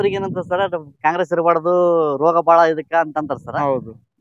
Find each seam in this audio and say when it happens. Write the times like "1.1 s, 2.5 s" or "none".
none